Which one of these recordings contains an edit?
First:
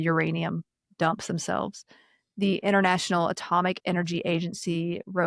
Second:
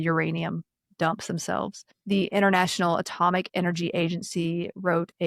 second; 1 cut; at 1.9 s

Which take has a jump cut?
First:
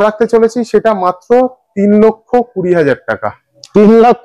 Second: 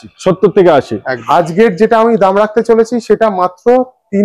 second; 1 cut; at 1.1 s

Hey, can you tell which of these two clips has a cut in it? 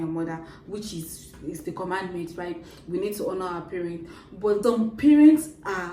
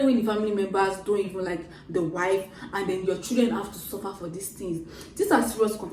first; 2 cuts; at 1.6 s, 4.6 s

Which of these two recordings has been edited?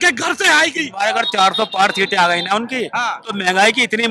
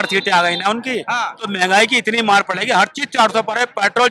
first; 1 cut; at 0.9 s

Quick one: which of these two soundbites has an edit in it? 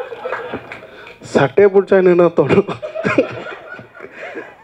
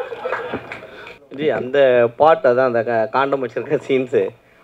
second; 1 cut; at 1.1 s

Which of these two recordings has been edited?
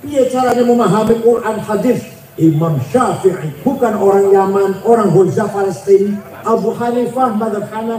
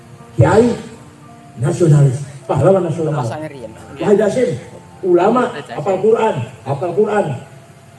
first; 2 cuts; at 3.5 s, 6.3 s

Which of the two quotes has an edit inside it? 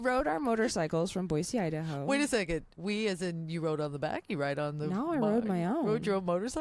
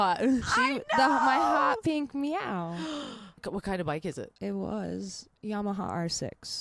second; 2 cuts; at 3.4 s, 5.3 s

